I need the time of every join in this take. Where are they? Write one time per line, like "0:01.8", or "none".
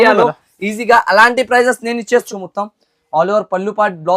0:02.3

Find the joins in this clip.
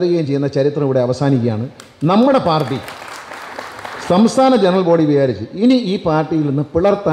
none

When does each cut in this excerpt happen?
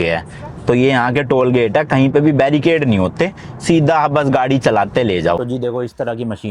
0:05.4

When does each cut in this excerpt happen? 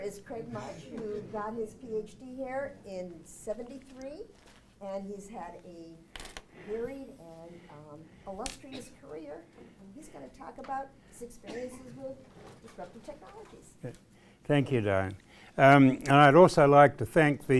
none

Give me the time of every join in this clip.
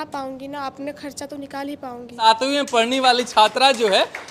0:02.2

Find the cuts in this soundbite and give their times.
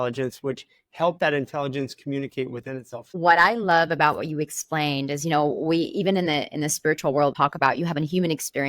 0:03.1
0:07.3

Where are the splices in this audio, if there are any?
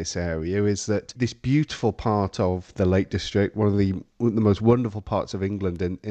0:01.2
0:02.7

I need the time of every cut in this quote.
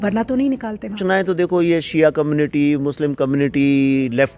0:01.0

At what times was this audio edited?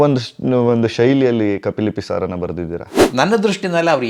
0:03.0

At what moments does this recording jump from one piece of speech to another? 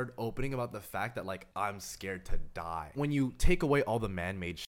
0:01.5
0:02.9

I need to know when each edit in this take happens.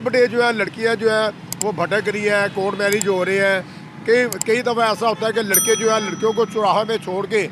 none

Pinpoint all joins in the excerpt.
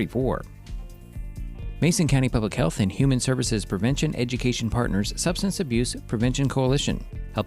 none

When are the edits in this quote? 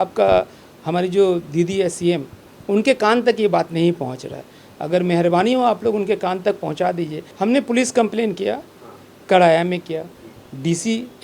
0:07.2

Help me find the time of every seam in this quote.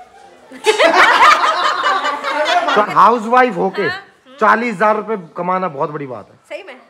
0:02.8

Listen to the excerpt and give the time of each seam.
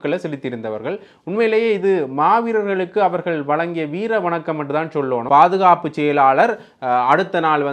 0:05.2

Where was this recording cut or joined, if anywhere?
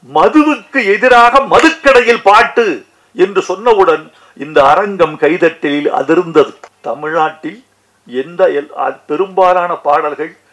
0:06.7

